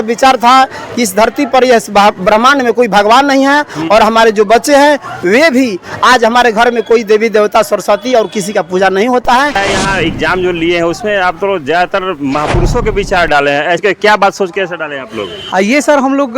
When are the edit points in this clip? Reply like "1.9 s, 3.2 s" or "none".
9.5 s, 13.8 s